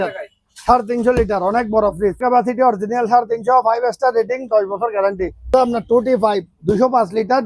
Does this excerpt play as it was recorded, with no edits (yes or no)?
no